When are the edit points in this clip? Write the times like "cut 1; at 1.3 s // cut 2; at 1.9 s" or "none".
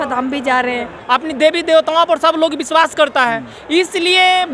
cut 1; at 0.9 s